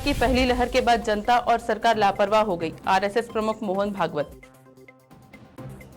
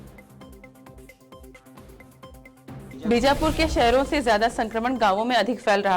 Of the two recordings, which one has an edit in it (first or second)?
second